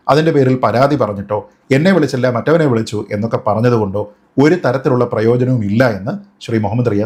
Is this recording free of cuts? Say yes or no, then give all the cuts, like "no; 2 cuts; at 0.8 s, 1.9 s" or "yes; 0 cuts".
yes; 0 cuts